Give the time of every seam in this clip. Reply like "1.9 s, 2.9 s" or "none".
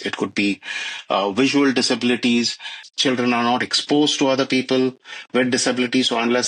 2.8 s